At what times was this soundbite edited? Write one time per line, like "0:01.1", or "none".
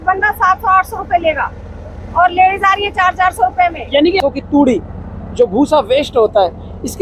0:04.2